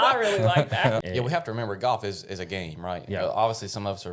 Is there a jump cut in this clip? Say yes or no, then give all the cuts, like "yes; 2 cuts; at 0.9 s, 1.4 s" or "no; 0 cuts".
yes; 1 cut; at 1.0 s